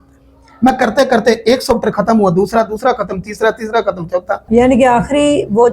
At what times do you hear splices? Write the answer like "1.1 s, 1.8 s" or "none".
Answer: 4.4 s